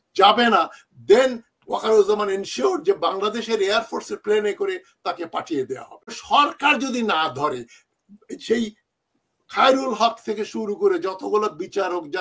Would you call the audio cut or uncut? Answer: cut